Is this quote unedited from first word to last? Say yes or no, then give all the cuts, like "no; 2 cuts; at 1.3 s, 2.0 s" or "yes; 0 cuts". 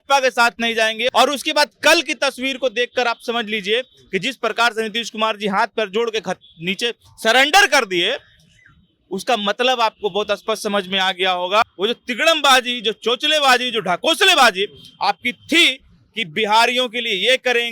no; 2 cuts; at 1.1 s, 11.6 s